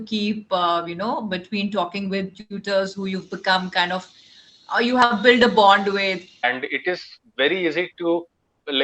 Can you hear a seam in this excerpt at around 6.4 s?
yes; 1 cut; at 6.4 s

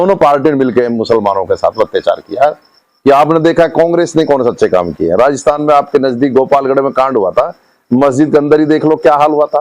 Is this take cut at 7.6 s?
no; 1 cut; at 2.7 s

